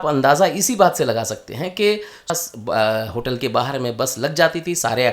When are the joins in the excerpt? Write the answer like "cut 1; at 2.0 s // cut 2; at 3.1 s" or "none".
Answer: cut 1; at 2.3 s